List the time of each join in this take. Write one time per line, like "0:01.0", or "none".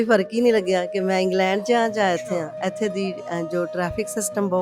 none